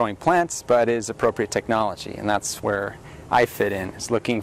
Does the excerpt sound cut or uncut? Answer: uncut